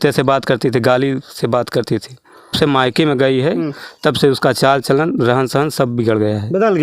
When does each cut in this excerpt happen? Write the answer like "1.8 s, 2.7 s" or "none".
2.5 s